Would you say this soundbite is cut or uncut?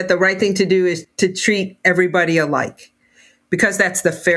cut